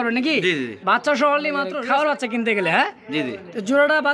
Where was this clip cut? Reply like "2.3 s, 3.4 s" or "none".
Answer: 2.1 s